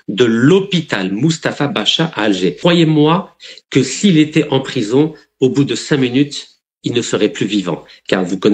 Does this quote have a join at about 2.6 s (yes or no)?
yes